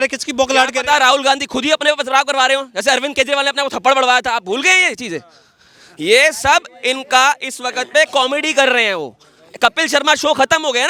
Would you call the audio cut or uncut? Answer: uncut